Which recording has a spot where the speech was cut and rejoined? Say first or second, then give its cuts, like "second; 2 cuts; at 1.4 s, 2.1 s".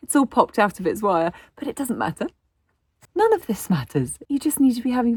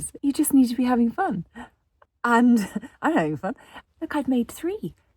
second; 1 cut; at 3.7 s